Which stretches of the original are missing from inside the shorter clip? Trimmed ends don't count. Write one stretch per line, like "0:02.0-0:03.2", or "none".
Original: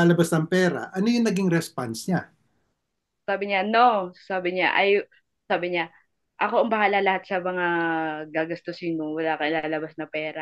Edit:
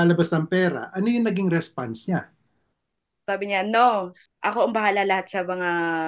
0:04.2-0:06.2